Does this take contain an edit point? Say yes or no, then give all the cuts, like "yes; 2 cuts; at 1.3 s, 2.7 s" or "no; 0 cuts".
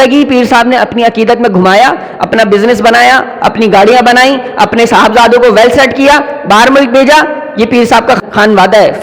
no; 0 cuts